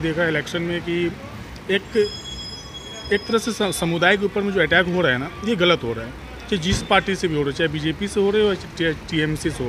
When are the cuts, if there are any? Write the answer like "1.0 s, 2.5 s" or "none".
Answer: none